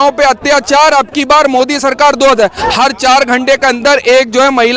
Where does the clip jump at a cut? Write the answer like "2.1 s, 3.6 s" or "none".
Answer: none